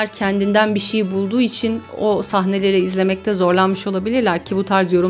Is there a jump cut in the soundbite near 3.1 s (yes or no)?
no